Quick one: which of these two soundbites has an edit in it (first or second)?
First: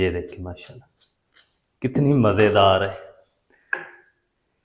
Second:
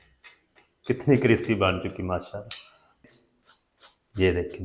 second